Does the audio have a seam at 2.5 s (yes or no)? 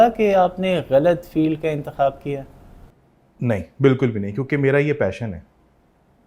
no